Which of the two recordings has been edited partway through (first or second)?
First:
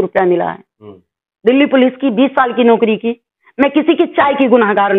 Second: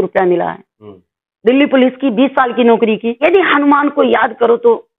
second